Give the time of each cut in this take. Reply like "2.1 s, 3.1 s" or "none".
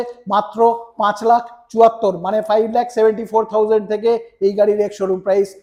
none